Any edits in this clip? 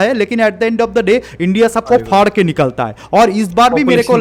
no; 0 cuts

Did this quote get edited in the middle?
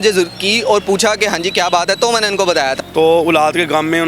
yes; 1 cut; at 2.8 s

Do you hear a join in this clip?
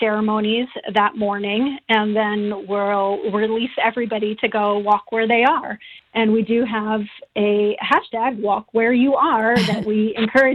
no; 0 cuts

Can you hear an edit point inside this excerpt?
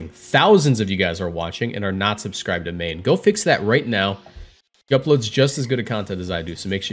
no; 0 cuts

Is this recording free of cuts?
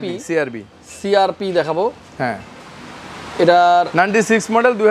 yes; 0 cuts

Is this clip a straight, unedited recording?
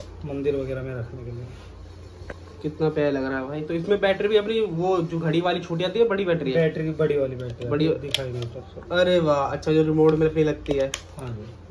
yes; 0 cuts

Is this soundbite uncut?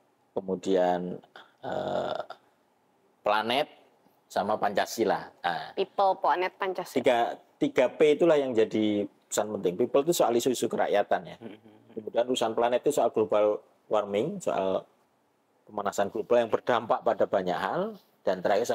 no; 1 cut; at 11.9 s

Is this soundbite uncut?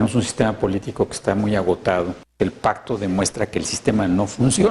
no; 1 cut; at 2.2 s

